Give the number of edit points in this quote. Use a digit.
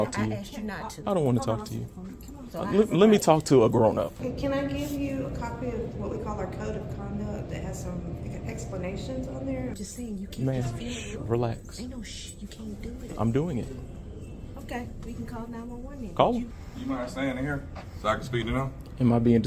4